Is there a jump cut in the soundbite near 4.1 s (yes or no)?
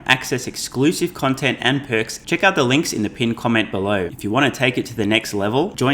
yes